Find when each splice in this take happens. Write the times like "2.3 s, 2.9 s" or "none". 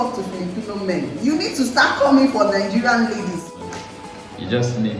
3.6 s